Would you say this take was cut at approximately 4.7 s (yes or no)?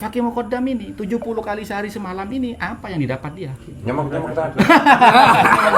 no